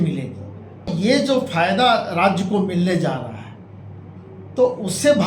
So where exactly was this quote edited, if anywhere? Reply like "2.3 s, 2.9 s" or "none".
0.9 s